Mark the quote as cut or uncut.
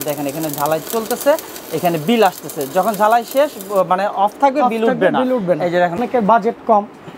cut